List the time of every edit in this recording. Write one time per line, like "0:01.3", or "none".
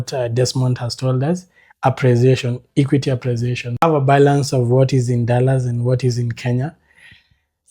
0:03.8